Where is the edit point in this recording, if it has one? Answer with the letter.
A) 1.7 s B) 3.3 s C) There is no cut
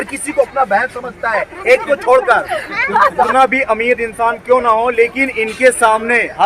B